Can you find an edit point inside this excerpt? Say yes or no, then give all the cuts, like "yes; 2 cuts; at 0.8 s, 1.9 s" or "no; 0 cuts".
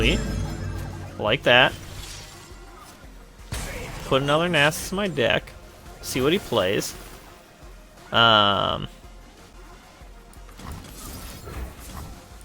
yes; 1 cut; at 9.5 s